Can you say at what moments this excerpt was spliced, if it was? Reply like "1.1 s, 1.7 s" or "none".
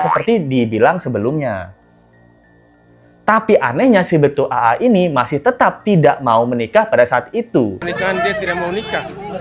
7.9 s